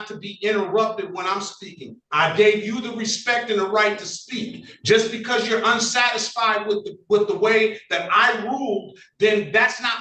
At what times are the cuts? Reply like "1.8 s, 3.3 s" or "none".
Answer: none